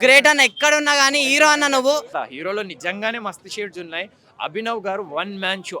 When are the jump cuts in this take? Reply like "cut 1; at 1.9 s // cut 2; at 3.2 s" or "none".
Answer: cut 1; at 2.2 s

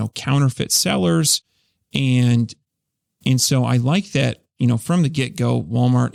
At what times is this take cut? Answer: none

